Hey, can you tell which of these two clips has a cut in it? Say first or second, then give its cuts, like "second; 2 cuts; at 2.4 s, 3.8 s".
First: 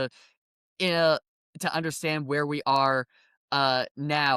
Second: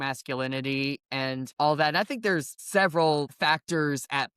second; 3 cuts; at 1.5 s, 2.6 s, 3.3 s